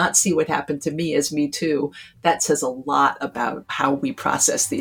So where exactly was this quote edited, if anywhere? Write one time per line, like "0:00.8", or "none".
0:03.7